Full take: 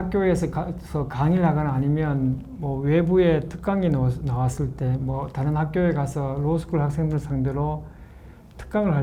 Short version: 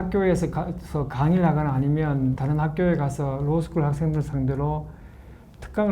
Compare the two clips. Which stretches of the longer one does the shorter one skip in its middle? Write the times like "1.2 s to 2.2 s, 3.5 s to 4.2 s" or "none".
2.4 s to 5.4 s